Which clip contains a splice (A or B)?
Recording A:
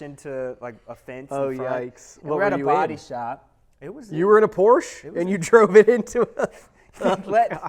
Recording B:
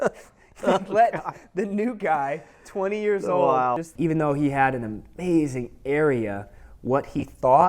B